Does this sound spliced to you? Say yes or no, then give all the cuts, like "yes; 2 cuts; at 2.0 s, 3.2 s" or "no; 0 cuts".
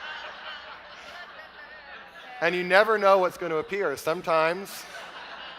yes; 1 cut; at 3.4 s